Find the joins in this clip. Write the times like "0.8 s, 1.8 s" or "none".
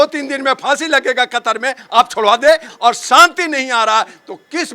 2.7 s